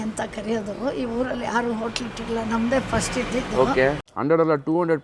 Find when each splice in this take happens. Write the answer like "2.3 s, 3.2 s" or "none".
4.1 s